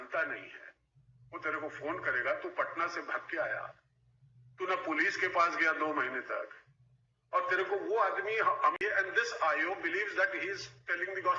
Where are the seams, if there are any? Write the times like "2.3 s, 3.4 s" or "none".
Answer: 8.8 s